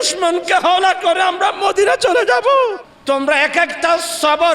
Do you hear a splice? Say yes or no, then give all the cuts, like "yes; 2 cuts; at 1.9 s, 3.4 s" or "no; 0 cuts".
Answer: yes; 1 cut; at 2.9 s